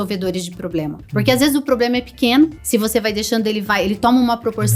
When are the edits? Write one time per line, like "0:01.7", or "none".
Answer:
0:01.0
0:02.6

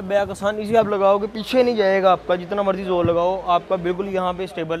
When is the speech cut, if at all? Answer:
none

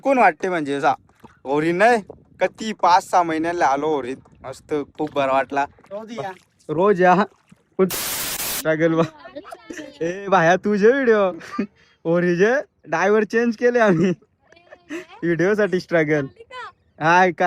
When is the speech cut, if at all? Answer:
0:07.9

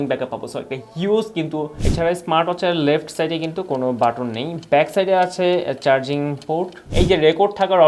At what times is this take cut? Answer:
0:01.7
0:06.8

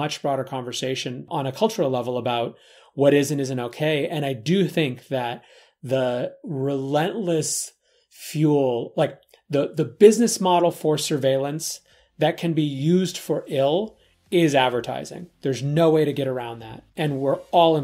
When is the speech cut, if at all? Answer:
0:01.3

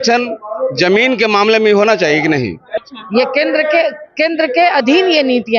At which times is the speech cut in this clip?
0:02.7

